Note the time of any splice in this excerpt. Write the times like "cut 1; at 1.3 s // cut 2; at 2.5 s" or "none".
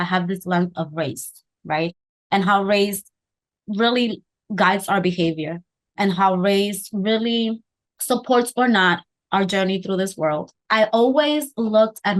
cut 1; at 10.5 s